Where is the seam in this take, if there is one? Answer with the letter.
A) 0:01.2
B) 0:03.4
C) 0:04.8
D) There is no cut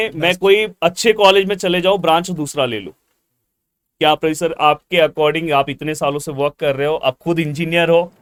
D